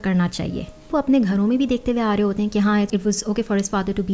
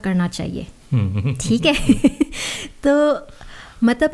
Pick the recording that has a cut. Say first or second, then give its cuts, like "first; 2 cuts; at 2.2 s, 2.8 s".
first; 2 cuts; at 0.9 s, 2.9 s